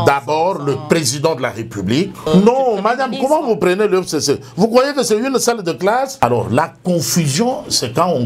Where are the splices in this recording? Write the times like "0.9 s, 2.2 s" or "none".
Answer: 2.3 s, 6.2 s